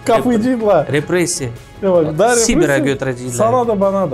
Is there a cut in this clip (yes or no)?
no